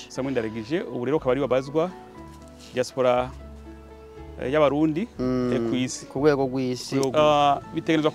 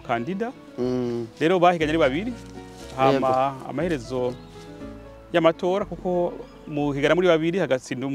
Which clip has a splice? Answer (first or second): first